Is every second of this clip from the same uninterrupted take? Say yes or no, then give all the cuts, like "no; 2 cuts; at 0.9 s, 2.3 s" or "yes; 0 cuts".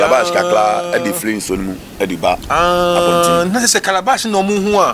yes; 0 cuts